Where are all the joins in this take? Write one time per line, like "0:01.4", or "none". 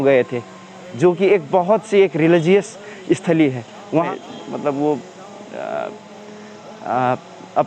0:04.1